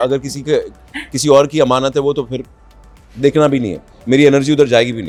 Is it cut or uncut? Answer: uncut